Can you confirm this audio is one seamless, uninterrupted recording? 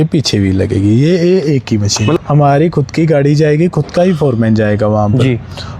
no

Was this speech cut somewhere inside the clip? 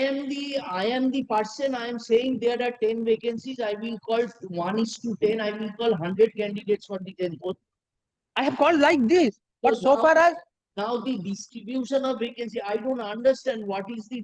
no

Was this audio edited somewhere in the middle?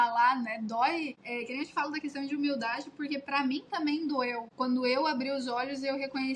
yes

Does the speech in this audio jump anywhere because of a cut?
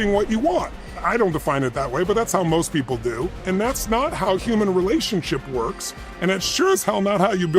yes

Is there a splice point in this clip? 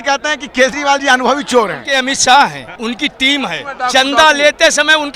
yes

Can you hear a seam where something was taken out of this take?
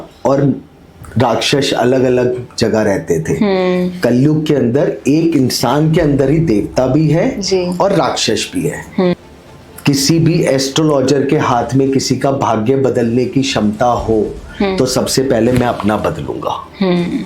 yes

